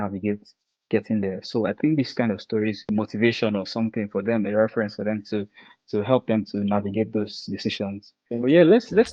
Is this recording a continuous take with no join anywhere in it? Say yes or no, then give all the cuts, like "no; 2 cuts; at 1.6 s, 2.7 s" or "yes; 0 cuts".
no; 2 cuts; at 2.8 s, 8.1 s